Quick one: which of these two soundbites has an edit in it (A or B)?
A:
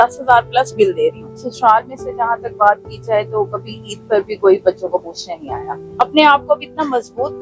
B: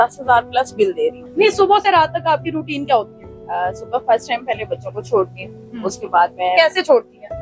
A